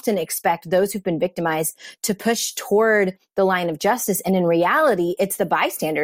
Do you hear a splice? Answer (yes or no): no